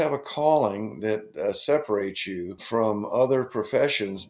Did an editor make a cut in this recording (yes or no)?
yes